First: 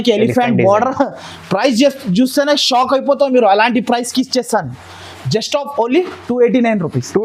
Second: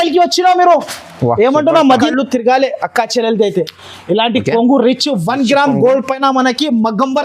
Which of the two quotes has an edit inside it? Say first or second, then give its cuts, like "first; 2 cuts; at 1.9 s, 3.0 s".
second; 1 cut; at 2.1 s